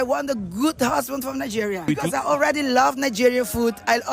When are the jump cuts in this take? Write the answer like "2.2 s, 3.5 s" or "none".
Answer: none